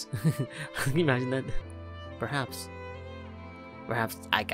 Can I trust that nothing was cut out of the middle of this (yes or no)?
no